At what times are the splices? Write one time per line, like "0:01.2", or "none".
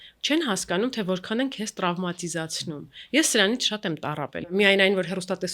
0:04.2